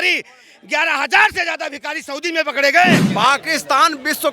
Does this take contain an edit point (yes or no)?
yes